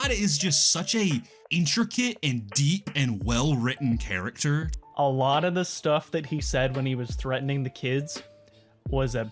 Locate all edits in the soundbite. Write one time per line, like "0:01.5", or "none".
0:01.4
0:04.7